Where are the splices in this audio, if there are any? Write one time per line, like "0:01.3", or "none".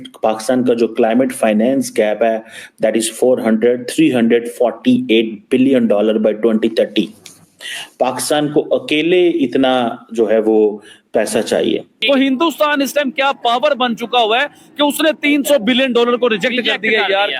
0:11.9

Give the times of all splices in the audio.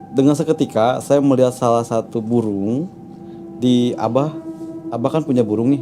none

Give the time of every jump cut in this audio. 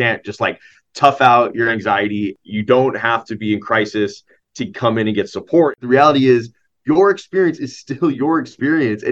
0:02.4
0:05.7

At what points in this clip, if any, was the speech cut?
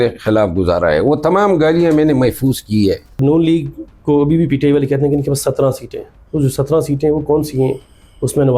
0:03.2
0:06.1

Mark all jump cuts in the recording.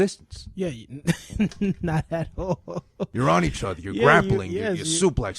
0:03.1

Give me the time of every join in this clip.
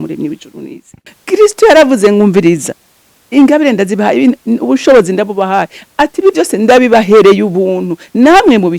0:01.1

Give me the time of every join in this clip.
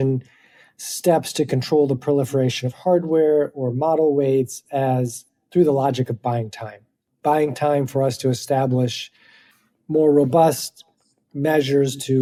none

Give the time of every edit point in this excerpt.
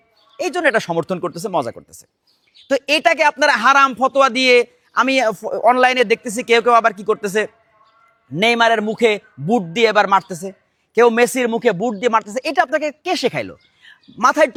none

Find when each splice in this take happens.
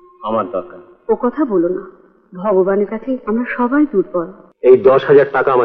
0:04.4

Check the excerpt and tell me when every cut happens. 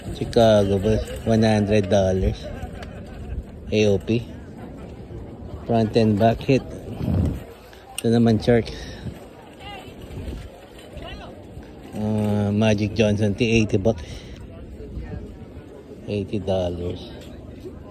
none

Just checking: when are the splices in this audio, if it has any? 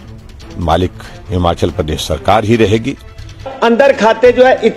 0:03.5

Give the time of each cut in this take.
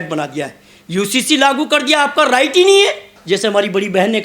0:03.1

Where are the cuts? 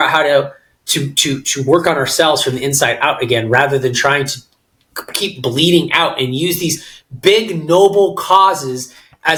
none

